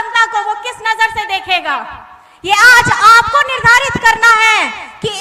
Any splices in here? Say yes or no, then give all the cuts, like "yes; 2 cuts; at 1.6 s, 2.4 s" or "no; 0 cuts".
no; 0 cuts